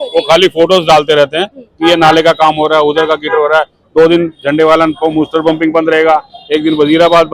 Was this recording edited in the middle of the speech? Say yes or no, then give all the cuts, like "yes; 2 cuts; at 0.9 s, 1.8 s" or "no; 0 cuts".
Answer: no; 0 cuts